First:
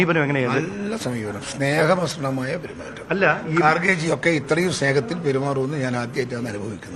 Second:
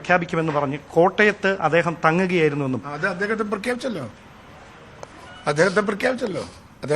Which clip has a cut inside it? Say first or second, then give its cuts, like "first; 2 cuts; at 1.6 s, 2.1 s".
second; 1 cut; at 3.2 s